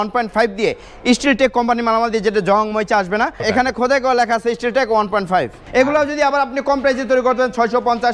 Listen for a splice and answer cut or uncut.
cut